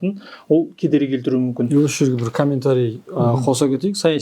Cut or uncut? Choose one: uncut